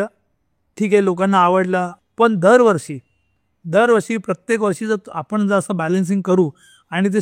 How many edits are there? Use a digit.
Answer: 1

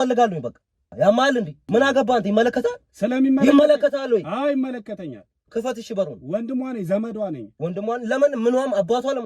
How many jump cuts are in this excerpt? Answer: 2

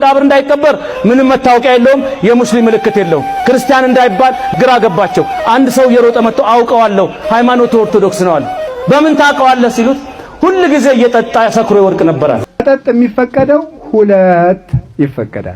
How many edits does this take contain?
2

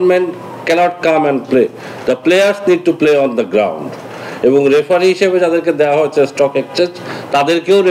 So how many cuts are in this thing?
0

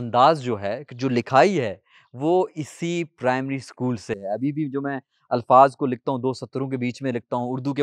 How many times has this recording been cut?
0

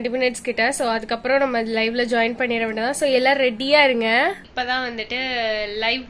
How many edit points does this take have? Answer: 1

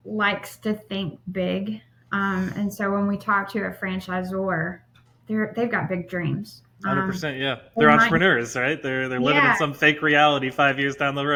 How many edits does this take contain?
0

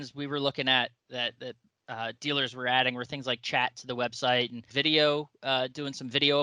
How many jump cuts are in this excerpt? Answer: 1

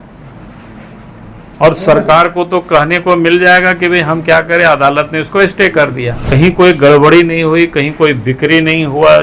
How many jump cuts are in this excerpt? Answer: 1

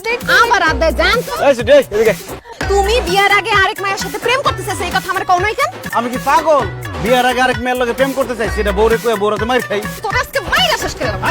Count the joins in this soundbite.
3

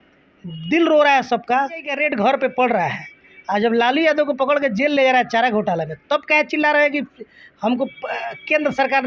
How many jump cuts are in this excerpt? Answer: 1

